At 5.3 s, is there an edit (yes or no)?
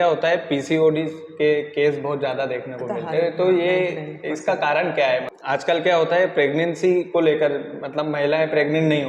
yes